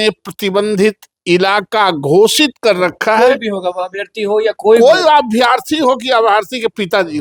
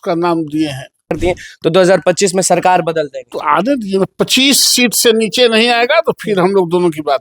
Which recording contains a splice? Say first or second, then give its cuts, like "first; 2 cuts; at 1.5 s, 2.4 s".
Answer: second; 2 cuts; at 1.2 s, 3.2 s